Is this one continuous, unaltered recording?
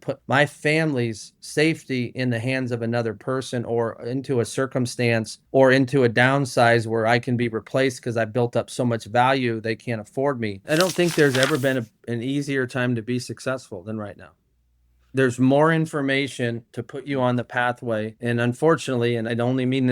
no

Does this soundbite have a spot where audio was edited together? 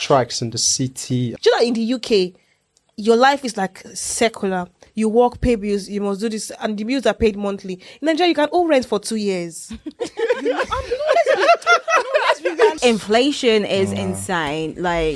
yes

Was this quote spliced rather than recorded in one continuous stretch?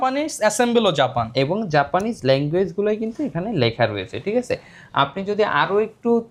no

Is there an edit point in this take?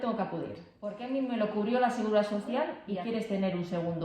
yes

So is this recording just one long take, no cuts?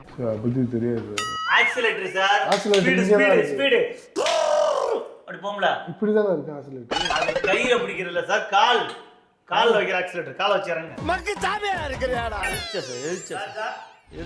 no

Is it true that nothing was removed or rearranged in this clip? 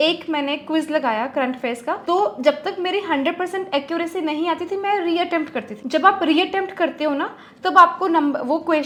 yes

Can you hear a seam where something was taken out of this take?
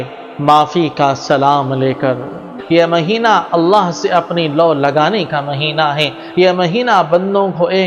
yes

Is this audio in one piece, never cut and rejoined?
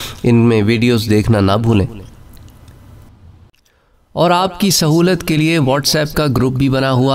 no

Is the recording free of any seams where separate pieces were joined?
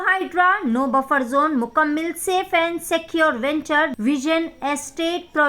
no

